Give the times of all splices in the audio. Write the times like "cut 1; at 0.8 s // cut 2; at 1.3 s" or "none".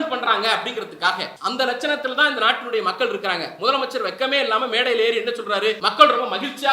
cut 1; at 1.3 s // cut 2; at 5.8 s